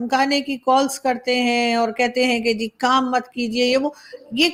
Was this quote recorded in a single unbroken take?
yes; 0 cuts

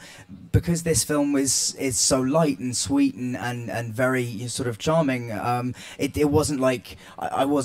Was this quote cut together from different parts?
yes; 1 cut; at 1.4 s

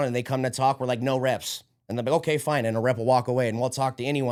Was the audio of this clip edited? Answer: no; 0 cuts

